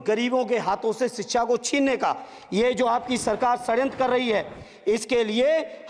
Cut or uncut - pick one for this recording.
uncut